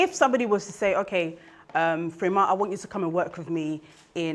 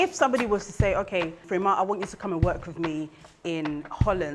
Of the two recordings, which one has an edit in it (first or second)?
second